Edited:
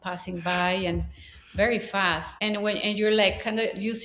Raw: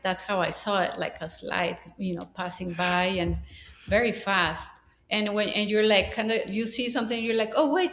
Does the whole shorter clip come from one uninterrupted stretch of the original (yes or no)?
no